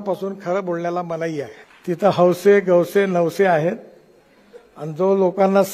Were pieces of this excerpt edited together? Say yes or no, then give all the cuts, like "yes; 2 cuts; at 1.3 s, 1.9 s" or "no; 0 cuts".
yes; 1 cut; at 1.6 s